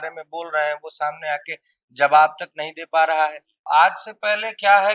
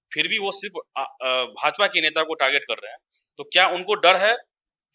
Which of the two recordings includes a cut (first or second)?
first